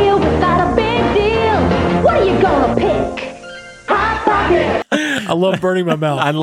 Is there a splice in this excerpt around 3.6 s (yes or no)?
no